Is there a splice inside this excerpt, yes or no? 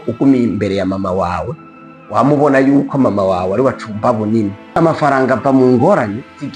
yes